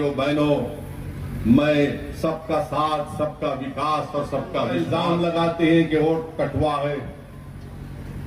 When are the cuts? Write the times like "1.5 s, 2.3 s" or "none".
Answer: 4.8 s